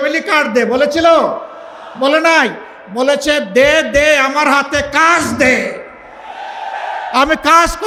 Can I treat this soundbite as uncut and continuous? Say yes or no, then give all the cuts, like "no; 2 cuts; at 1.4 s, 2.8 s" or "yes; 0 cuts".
yes; 0 cuts